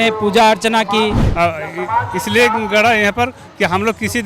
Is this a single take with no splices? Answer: no; 1 cut; at 1.2 s

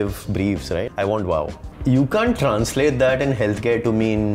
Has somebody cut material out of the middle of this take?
yes; 2 cuts; at 0.9 s, 1.6 s

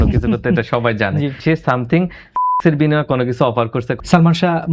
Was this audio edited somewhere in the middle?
yes; 2 cuts; at 1.4 s, 3.9 s

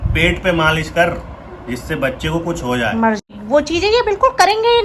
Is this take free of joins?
no; 1 cut; at 3.2 s

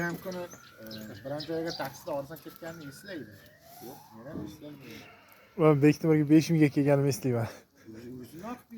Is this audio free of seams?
yes; 0 cuts

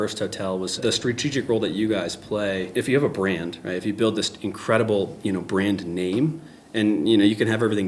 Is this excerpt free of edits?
no; 2 cuts; at 0.8 s, 2.7 s

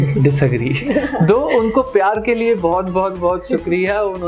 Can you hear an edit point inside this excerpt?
no; 0 cuts

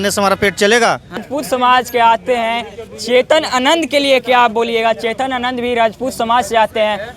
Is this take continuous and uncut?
no; 1 cut; at 1.3 s

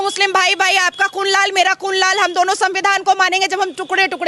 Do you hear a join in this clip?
no; 0 cuts

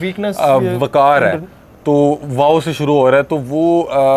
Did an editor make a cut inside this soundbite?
no; 0 cuts

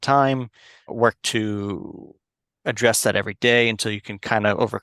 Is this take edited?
yes; 1 cut; at 0.9 s

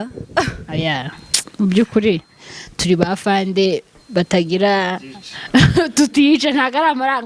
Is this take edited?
no; 0 cuts

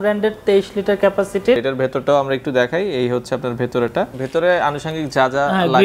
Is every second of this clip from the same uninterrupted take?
no; 2 cuts; at 1.6 s, 3.9 s

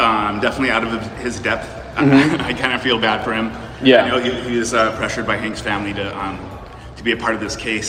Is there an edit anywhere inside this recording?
no; 0 cuts

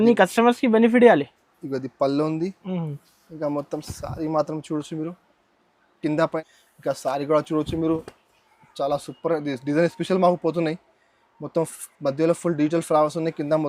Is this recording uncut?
no; 1 cut; at 6.4 s

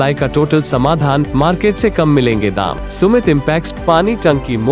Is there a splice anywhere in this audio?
yes; 1 cut; at 2.8 s

